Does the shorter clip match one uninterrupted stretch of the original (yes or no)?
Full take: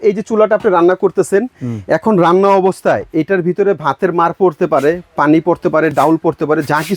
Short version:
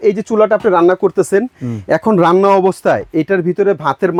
yes